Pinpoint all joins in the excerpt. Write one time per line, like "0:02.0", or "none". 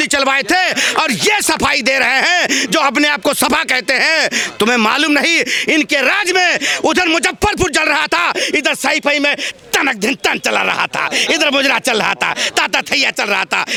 none

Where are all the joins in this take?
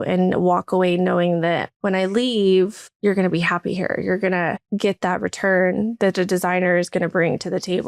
0:01.7
0:02.9
0:04.6

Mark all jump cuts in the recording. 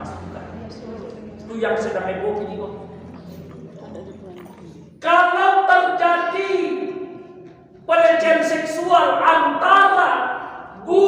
0:04.2

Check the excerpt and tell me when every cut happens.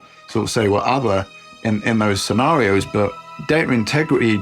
0:03.2

